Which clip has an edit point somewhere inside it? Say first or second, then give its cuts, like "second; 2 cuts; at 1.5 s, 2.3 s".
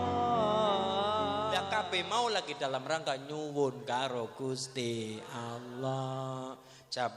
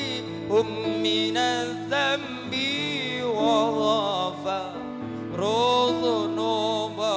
first; 1 cut; at 1.6 s